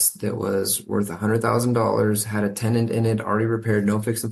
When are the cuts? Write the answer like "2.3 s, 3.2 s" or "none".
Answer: none